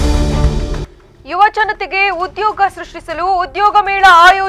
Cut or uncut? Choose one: cut